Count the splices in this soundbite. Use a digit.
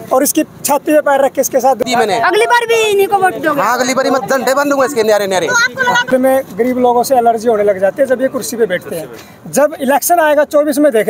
2